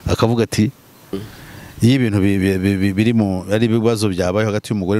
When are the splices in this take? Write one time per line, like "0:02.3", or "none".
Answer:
0:01.2